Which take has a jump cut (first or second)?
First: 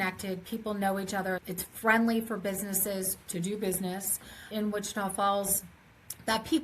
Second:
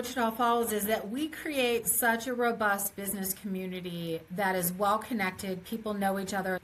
first